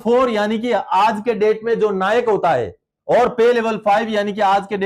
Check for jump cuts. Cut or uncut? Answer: uncut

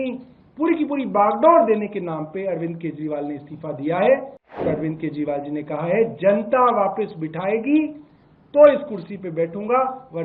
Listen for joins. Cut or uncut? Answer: cut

